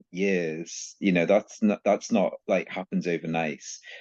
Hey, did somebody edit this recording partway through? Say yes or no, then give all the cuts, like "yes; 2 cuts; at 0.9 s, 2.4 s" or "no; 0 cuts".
no; 0 cuts